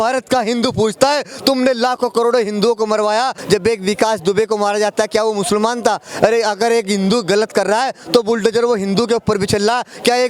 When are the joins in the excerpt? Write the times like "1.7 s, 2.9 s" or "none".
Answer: 3.4 s